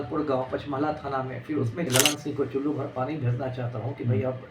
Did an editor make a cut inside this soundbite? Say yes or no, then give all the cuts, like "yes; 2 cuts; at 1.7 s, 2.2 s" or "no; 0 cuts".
yes; 1 cut; at 1.9 s